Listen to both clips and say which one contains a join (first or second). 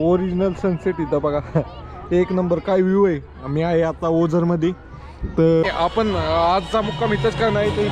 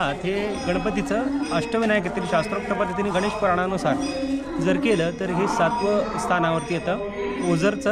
first